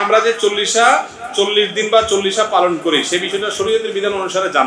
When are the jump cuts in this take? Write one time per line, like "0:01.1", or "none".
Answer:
none